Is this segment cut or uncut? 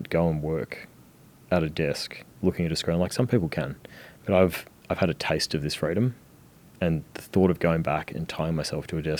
uncut